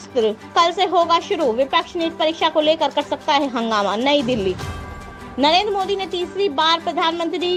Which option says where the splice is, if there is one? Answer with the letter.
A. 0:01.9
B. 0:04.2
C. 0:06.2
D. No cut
D